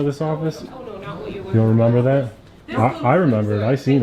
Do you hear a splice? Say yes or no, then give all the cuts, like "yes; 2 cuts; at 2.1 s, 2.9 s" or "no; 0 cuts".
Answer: no; 0 cuts